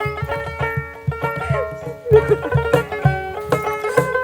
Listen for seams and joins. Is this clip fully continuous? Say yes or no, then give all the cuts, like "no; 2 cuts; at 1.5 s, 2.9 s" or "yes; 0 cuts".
yes; 0 cuts